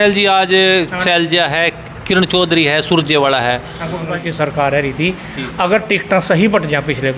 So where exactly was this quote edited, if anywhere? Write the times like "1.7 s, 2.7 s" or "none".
4.2 s